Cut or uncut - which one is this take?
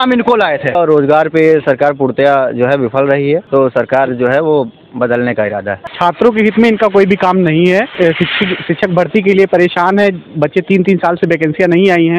cut